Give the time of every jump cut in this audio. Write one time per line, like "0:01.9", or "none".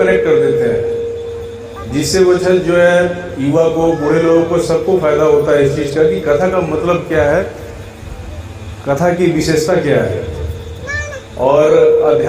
none